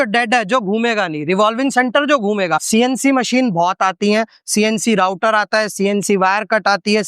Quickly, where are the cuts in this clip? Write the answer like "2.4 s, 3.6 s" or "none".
2.6 s